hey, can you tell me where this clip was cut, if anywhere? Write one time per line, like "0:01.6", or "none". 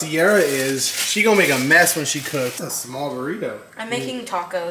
0:02.6